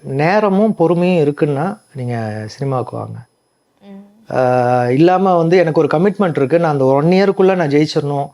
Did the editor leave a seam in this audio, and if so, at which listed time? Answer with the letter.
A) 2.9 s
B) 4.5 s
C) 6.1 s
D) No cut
D